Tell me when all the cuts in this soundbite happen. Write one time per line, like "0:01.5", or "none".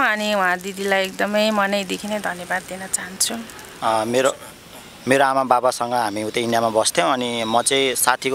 0:03.6